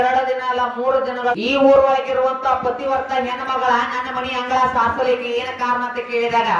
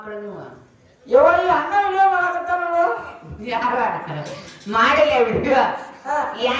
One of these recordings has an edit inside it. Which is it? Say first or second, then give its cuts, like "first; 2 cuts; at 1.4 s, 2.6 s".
first; 1 cut; at 1.3 s